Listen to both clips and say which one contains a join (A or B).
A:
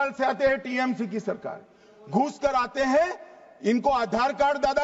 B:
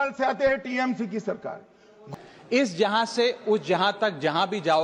B